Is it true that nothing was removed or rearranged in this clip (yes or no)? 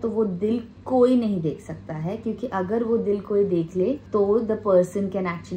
yes